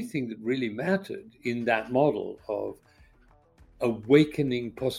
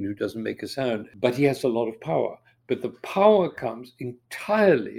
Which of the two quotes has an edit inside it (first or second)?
second